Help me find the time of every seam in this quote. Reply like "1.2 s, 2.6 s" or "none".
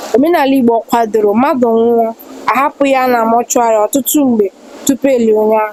none